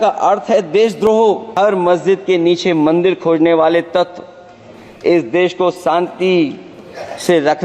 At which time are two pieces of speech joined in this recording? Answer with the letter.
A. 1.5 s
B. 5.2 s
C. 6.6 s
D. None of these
A